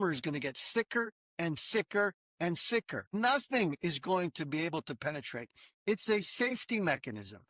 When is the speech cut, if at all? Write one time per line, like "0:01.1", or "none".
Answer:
0:03.1